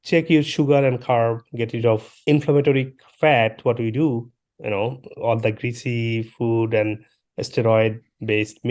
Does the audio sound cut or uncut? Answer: uncut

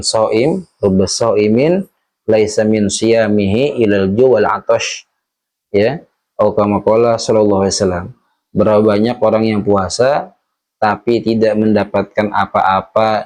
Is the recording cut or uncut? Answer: uncut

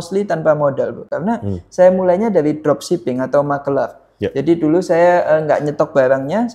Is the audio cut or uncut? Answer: uncut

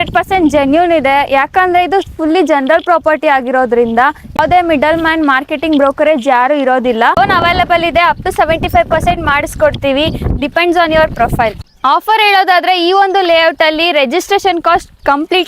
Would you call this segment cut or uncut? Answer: cut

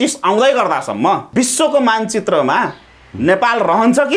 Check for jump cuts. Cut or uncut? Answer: cut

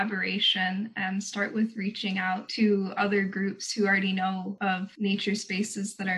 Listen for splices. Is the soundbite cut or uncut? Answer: cut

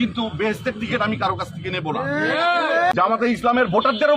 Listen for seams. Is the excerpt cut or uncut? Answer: cut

